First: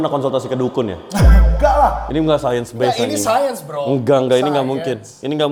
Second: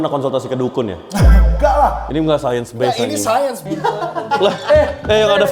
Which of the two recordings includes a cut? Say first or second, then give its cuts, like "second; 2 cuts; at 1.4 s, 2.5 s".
second; 1 cut; at 3.6 s